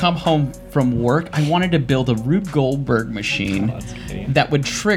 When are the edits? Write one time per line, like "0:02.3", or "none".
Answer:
none